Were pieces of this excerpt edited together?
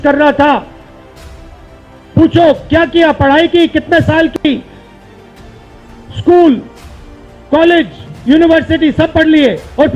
no; 0 cuts

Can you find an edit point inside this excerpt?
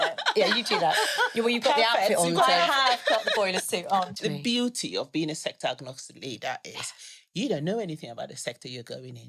yes; 1 cut; at 4.1 s

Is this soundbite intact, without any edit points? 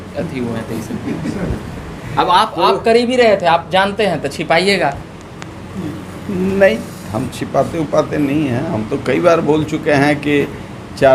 yes; 0 cuts

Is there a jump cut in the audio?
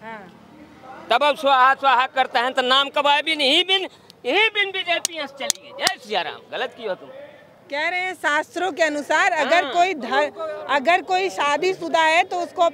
no; 0 cuts

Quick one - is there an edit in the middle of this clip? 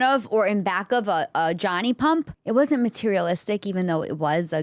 yes; 1 cut; at 2.4 s

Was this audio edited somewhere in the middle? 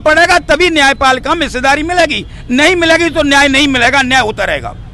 no; 0 cuts

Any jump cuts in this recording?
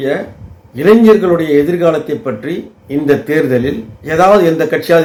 no; 0 cuts

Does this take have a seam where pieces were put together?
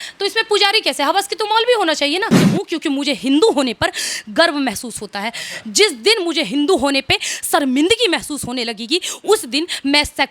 yes; 1 cut; at 2.5 s

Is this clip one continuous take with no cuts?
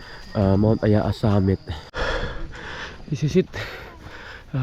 no; 1 cut; at 1.9 s

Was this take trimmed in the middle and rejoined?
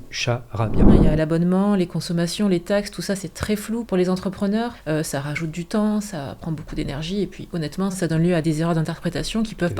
yes; 4 cuts; at 0.9 s, 3.8 s, 4.8 s, 8.4 s

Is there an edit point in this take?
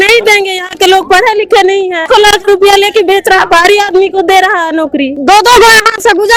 yes; 2 cuts; at 2.1 s, 5.1 s

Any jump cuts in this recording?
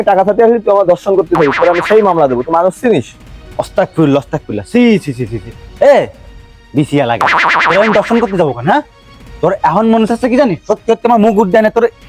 no; 0 cuts

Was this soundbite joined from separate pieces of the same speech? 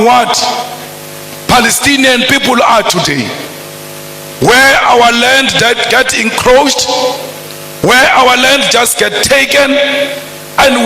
no; 0 cuts

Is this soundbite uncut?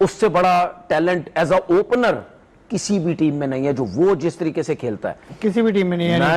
yes; 0 cuts

